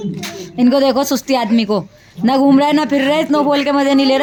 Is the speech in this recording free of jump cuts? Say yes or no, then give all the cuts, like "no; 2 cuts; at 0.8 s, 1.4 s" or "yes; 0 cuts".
yes; 0 cuts